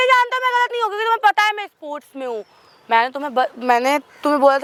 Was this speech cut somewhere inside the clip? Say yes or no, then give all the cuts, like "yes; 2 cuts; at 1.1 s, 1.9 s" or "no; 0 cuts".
no; 0 cuts